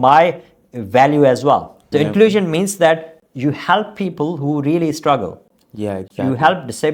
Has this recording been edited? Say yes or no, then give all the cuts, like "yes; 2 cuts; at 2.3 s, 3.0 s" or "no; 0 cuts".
yes; 1 cut; at 1.9 s